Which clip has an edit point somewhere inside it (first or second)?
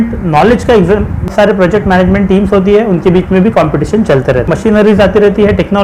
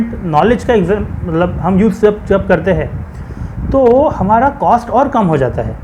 first